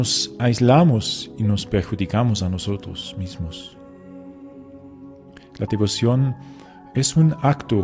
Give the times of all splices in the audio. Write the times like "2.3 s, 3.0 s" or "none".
5.0 s